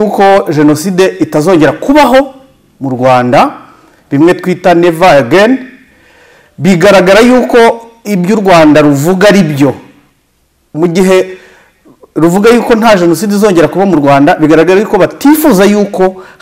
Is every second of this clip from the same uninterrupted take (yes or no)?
yes